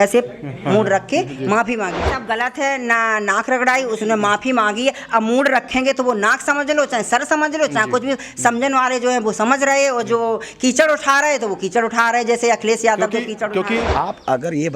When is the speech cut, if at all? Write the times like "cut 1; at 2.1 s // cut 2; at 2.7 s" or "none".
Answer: cut 1; at 2.1 s // cut 2; at 13.9 s